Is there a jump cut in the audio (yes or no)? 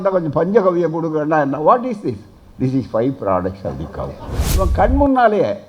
yes